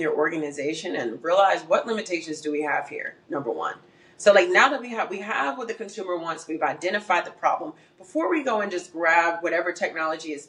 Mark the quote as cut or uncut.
uncut